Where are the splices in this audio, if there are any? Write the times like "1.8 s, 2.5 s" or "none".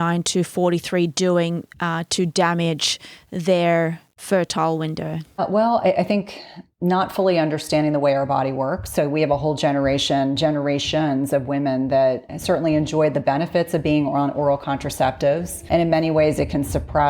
5.4 s, 12.3 s, 15.5 s